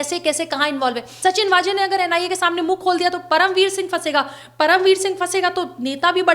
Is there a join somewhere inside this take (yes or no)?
yes